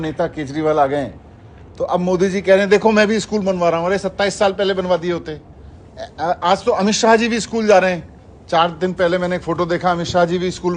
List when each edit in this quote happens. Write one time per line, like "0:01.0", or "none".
none